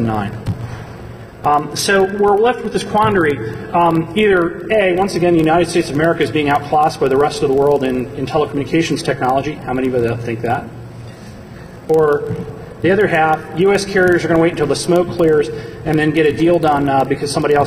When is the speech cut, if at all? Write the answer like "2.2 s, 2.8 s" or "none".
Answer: none